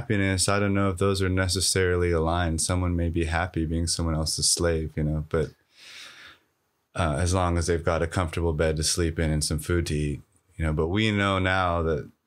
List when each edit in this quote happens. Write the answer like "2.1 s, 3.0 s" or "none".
none